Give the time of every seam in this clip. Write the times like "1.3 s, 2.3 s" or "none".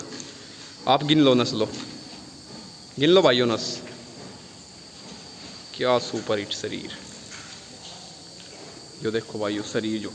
none